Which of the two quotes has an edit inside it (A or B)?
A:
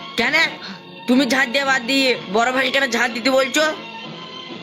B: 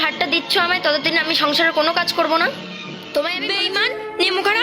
B